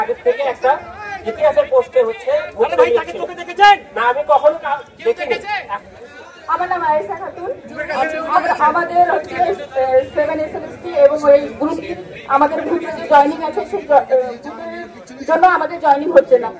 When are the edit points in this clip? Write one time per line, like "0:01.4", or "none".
none

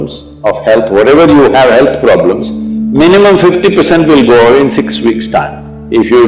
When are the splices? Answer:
none

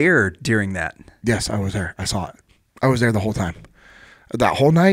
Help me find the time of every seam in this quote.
none

